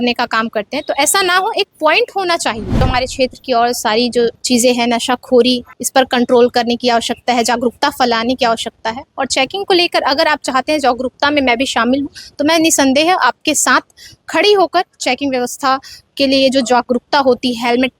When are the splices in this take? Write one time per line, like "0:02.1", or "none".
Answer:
0:02.8
0:04.4
0:05.7